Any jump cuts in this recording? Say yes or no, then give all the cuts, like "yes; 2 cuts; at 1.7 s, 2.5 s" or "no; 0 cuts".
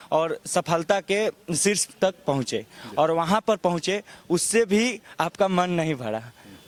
no; 0 cuts